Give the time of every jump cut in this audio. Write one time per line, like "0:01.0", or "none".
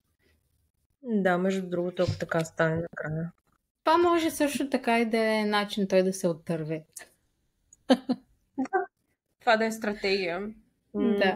0:03.8